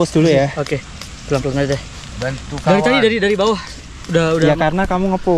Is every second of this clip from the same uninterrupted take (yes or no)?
yes